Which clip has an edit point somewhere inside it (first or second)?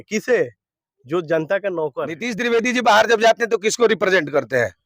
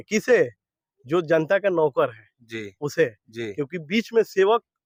first